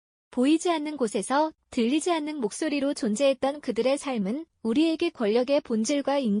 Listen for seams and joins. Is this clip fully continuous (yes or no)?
yes